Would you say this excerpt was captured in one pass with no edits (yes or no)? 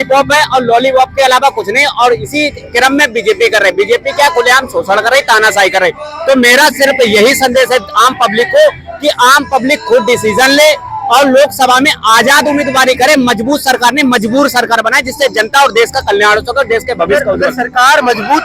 yes